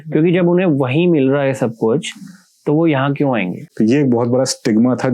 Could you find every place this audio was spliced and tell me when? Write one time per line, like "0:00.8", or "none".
0:03.6